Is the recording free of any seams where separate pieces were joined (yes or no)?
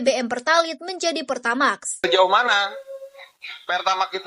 no